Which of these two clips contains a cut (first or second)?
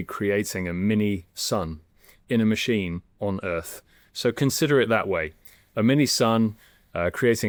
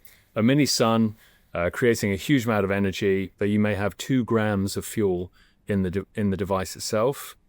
second